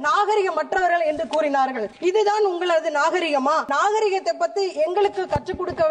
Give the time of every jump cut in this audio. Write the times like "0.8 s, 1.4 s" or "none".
1.9 s, 3.7 s

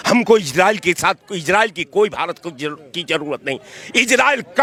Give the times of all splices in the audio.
none

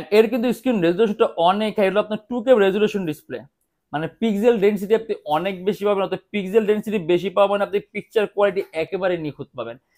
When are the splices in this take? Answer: none

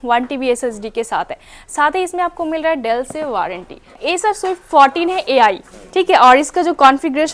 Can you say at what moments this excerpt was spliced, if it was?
4.0 s

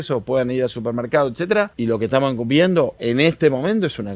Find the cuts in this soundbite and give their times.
1.7 s, 3.0 s

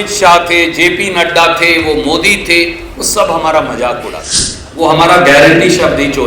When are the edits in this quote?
4.6 s

